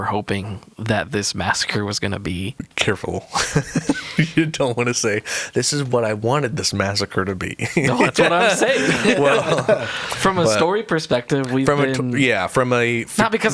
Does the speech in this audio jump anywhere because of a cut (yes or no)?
yes